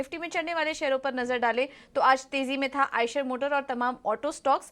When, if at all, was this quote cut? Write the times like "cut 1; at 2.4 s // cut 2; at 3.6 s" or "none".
cut 1; at 1.1 s